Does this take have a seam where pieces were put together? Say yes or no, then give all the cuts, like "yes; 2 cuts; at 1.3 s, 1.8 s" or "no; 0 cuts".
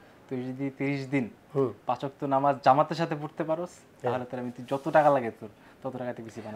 no; 0 cuts